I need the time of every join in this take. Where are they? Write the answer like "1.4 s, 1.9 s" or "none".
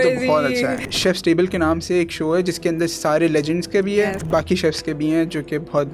0.8 s, 4.2 s